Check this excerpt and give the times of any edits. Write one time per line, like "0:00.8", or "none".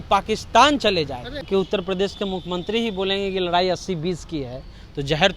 0:01.4